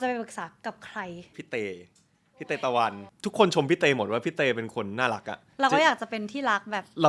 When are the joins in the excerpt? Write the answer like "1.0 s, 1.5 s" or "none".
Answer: 1.4 s, 3.1 s, 5.4 s